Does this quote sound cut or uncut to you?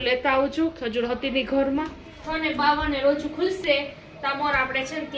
cut